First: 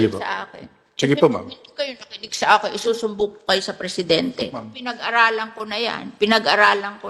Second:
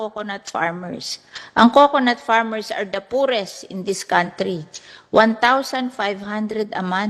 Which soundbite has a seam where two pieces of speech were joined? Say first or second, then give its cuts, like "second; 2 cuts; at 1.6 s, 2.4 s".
first; 1 cut; at 4.7 s